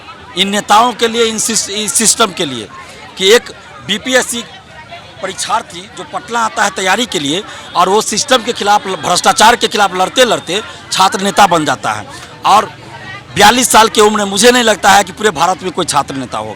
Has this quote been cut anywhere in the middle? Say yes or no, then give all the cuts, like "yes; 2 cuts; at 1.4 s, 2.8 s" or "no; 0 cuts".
no; 0 cuts